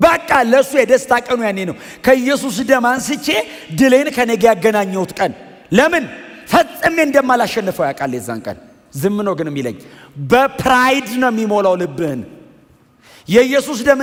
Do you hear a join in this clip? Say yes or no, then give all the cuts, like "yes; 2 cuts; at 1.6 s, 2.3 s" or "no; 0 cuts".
no; 0 cuts